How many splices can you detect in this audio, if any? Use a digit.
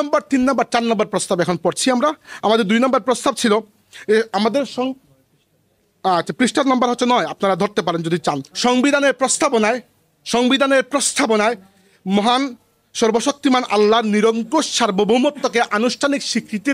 1